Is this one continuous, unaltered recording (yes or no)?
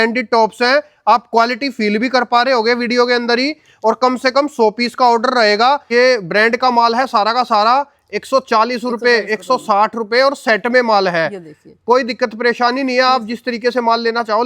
no